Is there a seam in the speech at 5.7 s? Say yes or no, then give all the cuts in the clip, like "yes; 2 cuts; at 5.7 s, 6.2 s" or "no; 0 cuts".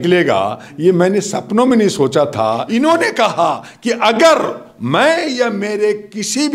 no; 1 cut; at 2.6 s